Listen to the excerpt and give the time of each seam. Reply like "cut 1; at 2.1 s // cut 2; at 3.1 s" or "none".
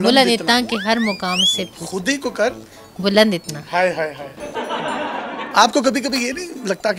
cut 1; at 4.3 s // cut 2; at 5.4 s